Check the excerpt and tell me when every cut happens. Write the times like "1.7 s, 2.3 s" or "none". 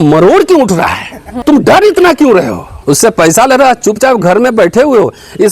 1.3 s, 2.7 s